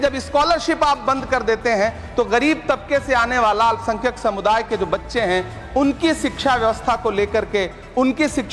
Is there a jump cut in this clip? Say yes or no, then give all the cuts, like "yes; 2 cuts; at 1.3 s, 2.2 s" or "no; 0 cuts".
no; 0 cuts